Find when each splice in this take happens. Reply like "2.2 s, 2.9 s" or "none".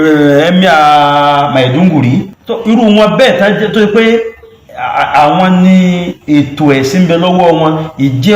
2.4 s